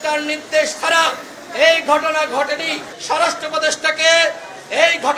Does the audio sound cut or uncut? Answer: cut